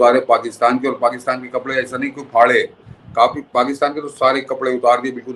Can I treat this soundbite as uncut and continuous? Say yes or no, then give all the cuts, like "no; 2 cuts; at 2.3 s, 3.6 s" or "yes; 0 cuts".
yes; 0 cuts